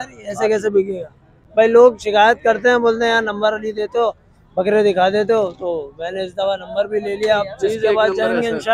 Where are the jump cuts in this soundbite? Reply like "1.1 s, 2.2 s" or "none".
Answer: 1.4 s